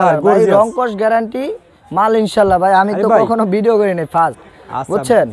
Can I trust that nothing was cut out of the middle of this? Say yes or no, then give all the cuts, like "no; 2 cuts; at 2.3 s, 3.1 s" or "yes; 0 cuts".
yes; 0 cuts